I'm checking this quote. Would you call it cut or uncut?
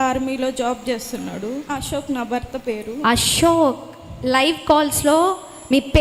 cut